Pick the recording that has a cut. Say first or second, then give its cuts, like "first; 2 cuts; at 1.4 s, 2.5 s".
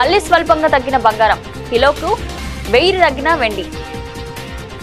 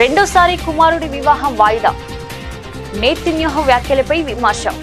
first; 1 cut; at 3.6 s